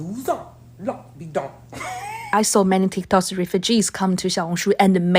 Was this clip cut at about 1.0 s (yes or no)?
no